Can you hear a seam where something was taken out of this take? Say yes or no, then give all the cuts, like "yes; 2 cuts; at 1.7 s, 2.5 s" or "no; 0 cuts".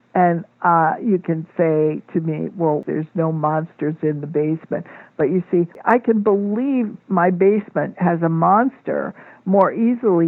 yes; 2 cuts; at 2.8 s, 5.8 s